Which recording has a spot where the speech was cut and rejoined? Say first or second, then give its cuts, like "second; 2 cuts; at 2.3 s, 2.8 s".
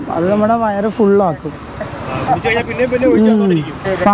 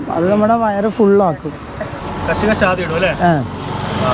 second; 1 cut; at 2.0 s